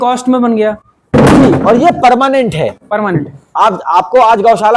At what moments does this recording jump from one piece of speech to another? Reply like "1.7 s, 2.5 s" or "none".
none